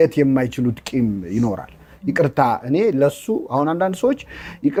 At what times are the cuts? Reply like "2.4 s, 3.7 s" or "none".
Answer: none